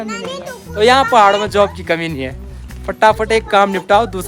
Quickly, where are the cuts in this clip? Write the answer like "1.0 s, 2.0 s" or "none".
none